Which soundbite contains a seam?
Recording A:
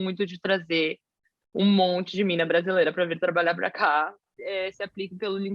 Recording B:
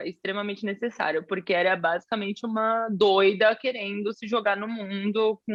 A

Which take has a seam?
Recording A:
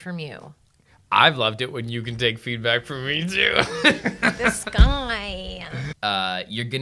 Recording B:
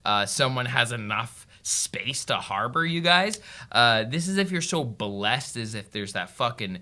A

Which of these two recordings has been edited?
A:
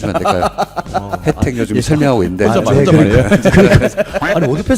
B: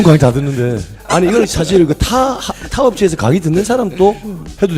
B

